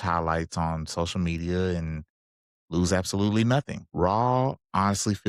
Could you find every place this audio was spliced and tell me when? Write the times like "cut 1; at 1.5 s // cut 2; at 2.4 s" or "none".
cut 1; at 3.8 s